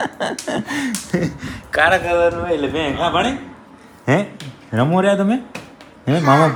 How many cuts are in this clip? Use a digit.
0